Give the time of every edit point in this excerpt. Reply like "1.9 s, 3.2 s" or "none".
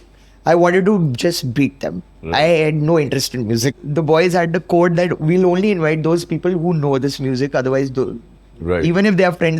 3.8 s